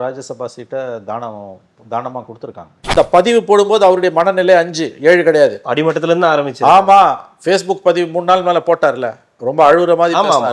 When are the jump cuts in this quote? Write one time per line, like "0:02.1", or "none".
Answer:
0:02.9